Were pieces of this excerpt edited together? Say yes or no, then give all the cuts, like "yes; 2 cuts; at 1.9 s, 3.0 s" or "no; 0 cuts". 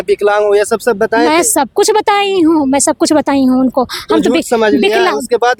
no; 0 cuts